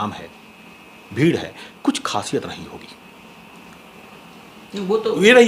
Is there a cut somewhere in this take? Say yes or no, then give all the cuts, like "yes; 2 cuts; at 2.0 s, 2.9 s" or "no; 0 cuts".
no; 0 cuts